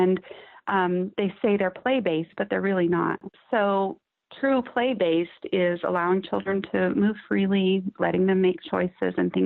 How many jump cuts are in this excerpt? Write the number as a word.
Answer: two